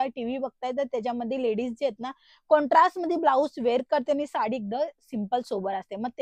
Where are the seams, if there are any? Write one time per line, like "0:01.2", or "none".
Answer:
none

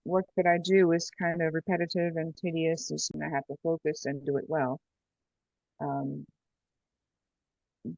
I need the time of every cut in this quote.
0:03.1

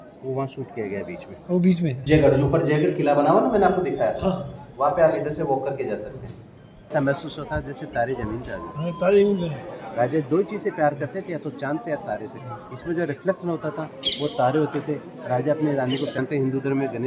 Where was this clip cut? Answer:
0:02.0
0:06.9
0:16.2

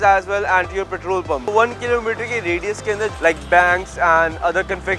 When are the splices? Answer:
0:01.5
0:03.1

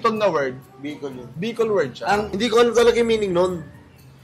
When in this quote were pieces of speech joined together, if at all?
0:02.3

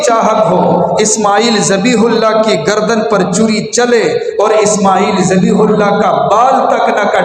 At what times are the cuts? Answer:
none

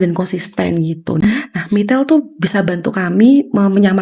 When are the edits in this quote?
0:01.2

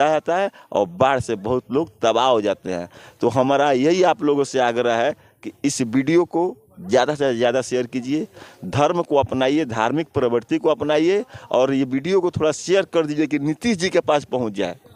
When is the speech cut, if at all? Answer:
none

